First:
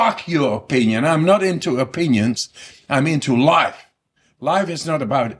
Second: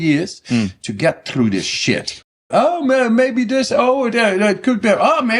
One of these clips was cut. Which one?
second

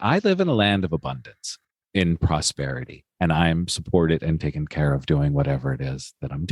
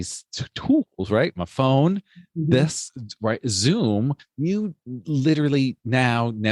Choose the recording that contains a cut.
first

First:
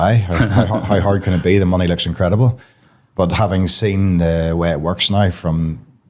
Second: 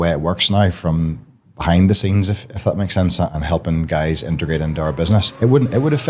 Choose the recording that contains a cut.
second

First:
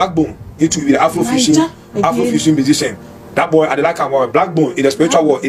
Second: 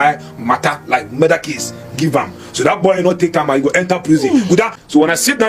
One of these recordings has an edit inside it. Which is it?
second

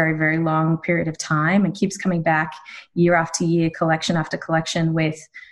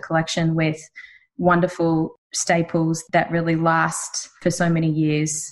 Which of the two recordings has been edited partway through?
second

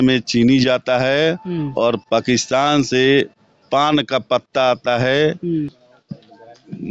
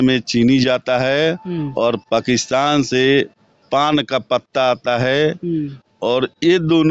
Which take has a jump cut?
first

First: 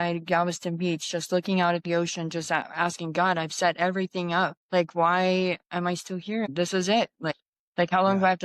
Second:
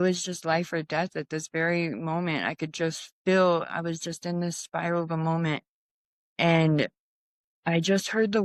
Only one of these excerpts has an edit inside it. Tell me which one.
first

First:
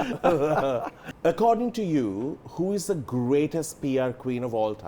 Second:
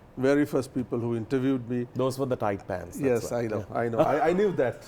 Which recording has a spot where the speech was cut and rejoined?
first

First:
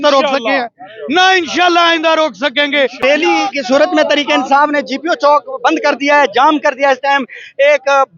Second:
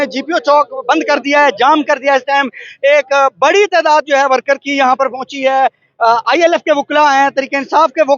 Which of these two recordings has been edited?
first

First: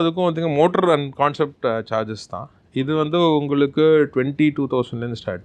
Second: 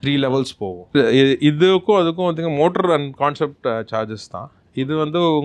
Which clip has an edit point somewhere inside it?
second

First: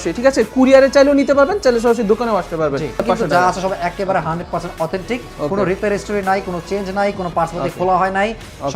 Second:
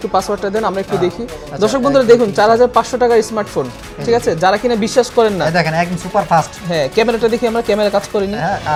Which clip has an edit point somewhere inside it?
first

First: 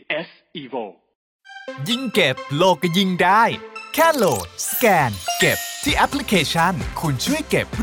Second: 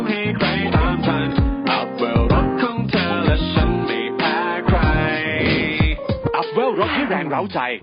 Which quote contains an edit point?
first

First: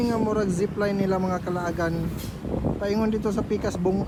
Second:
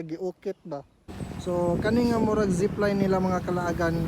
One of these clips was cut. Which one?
second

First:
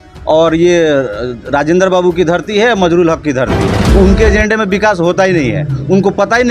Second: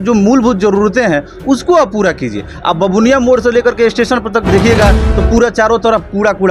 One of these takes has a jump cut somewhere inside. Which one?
first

